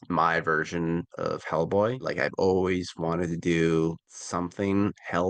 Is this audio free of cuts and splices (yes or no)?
yes